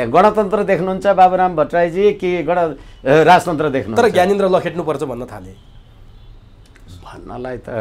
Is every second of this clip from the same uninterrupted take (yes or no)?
yes